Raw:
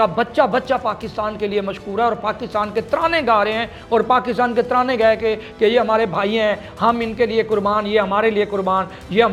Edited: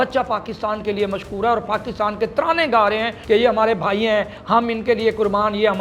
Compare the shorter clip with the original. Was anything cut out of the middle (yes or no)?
yes